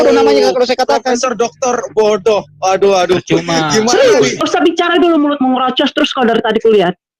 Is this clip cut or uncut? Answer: cut